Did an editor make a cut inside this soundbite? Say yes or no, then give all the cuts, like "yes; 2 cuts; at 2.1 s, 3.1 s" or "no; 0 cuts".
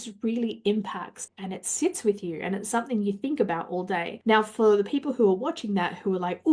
yes; 2 cuts; at 1.2 s, 4.1 s